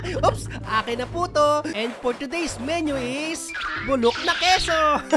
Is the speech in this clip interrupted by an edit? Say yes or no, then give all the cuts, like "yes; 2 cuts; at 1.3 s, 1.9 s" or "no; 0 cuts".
yes; 1 cut; at 1.7 s